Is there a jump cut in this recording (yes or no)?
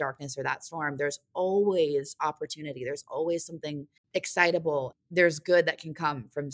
yes